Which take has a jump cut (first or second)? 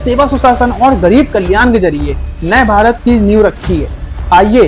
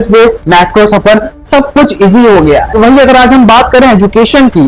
second